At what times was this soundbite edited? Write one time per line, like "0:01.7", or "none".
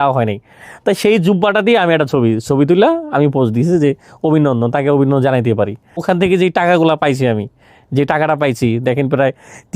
0:06.0